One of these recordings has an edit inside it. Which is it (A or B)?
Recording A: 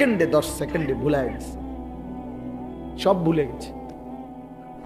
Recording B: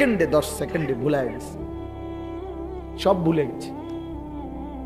A